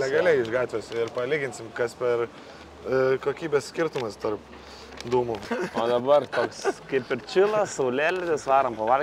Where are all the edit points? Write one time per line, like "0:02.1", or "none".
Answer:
none